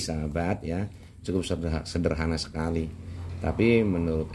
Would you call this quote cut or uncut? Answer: uncut